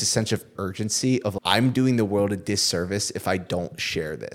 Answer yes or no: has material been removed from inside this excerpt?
yes